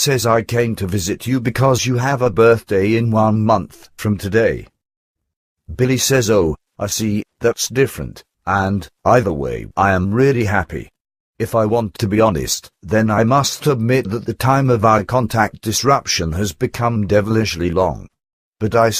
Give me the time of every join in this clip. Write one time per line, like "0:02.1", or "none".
0:07.7